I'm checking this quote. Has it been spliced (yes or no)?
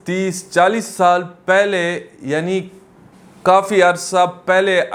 no